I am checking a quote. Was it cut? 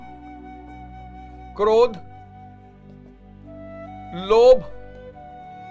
yes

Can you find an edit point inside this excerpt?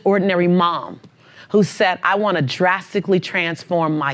no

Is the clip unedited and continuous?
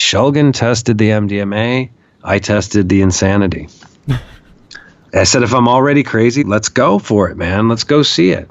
no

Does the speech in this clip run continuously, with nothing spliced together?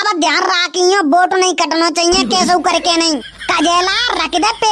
yes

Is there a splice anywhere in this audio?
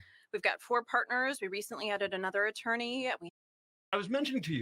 yes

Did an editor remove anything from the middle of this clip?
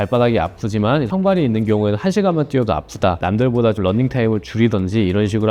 yes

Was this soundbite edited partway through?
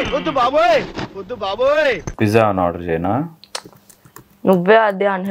yes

